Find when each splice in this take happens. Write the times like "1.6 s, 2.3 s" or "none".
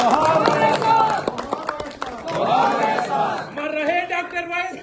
none